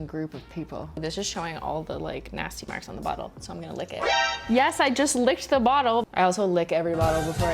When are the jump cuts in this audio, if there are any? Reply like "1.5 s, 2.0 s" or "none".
0.9 s, 6.1 s